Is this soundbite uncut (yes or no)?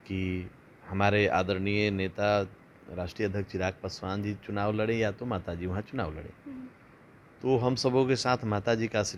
yes